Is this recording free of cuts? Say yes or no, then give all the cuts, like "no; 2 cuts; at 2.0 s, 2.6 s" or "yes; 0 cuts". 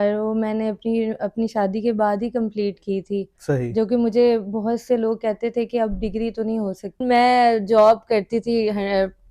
no; 1 cut; at 7.0 s